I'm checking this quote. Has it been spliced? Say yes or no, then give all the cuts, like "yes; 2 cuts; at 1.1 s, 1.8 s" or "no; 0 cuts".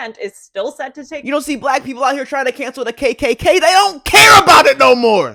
no; 0 cuts